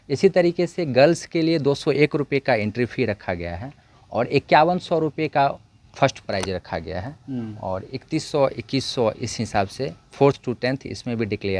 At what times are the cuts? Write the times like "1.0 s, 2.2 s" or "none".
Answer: none